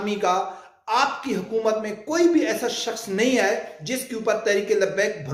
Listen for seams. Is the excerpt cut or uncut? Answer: uncut